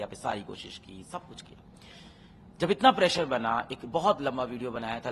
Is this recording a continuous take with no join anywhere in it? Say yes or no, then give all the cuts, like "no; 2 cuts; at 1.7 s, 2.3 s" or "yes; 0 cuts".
yes; 0 cuts